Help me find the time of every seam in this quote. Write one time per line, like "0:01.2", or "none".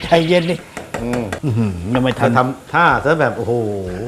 0:01.3